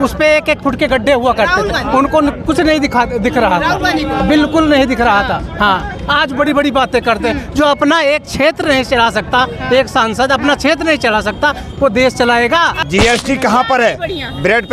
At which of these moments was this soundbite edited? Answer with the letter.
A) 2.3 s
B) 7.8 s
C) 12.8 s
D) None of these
C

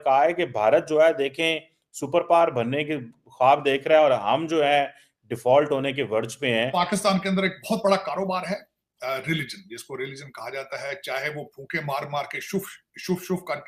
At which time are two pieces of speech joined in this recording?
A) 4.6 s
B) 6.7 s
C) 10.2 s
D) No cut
B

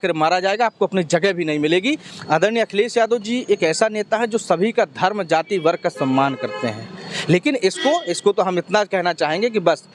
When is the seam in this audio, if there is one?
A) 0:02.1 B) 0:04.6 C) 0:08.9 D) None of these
A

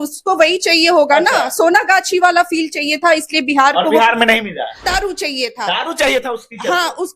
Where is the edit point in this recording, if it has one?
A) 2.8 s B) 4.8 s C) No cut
B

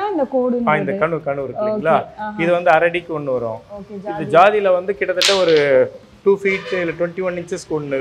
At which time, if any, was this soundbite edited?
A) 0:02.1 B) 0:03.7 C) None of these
C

